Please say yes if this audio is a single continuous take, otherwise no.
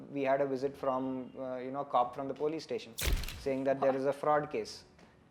yes